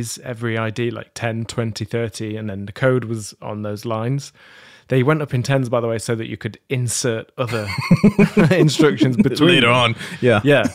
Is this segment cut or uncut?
uncut